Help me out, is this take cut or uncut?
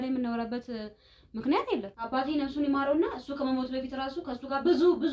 cut